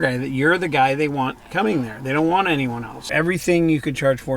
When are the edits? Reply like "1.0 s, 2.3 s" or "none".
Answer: 3.0 s

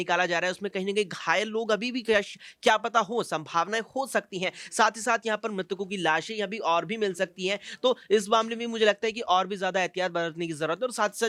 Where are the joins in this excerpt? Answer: none

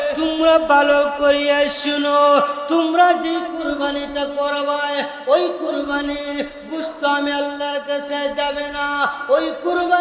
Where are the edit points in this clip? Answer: none

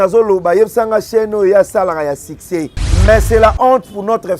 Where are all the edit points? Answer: 2.8 s

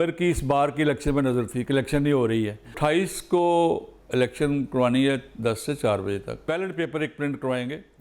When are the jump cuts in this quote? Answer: 2.7 s, 6.4 s

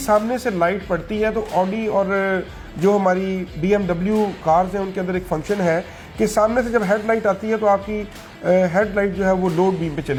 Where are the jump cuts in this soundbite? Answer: none

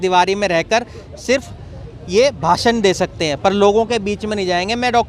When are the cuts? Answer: none

